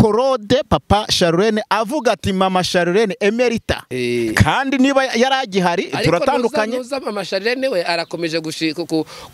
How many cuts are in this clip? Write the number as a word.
one